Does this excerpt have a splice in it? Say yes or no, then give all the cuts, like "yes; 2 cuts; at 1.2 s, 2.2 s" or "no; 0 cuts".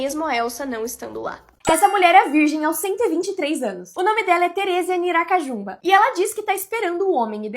yes; 1 cut; at 1.4 s